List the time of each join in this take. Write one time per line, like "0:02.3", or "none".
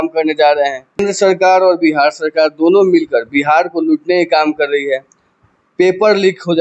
0:01.0